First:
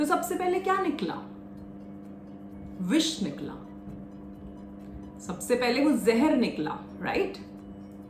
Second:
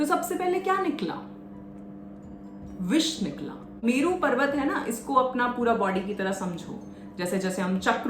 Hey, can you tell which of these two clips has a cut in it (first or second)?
second